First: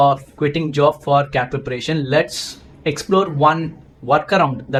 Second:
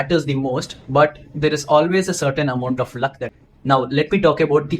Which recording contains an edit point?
second; 1 cut; at 3.3 s

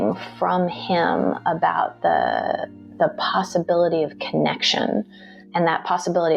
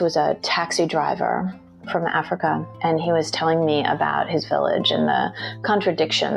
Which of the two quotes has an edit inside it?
second; 1 cut; at 2.7 s

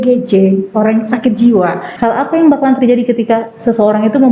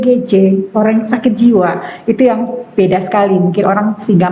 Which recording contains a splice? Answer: first; 1 cut; at 1.9 s

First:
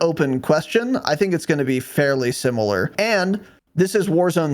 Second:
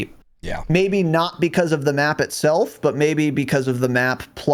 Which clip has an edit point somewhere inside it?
first; 1 cut; at 2.9 s

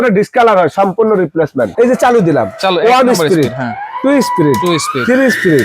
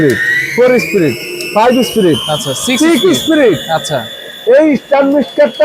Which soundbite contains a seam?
first; 1 cut; at 1.7 s

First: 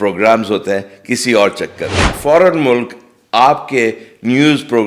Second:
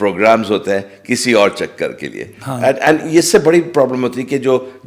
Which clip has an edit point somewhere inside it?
first; 1 cut; at 2.1 s

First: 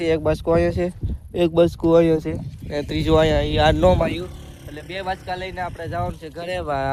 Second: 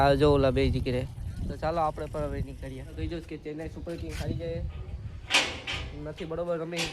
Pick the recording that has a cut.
second; 1 cut; at 2.9 s

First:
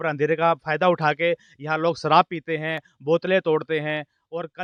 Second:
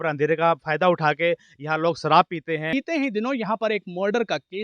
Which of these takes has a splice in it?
second; 1 cut; at 2.7 s

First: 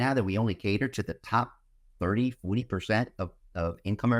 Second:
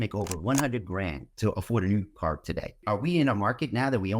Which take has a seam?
second; 2 cuts; at 1.3 s, 2.8 s

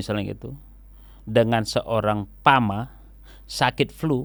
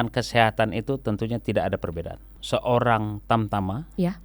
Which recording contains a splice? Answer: second; 1 cut; at 2.3 s

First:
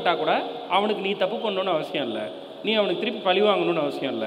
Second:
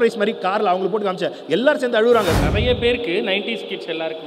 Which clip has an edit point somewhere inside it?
second; 1 cut; at 2.4 s

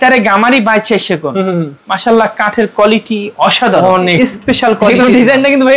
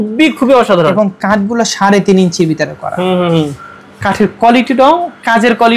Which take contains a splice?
first; 1 cut; at 4.0 s

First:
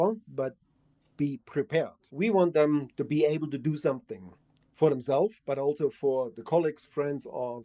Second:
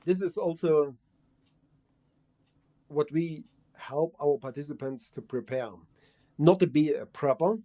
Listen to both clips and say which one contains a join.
first; 1 cut; at 2.0 s

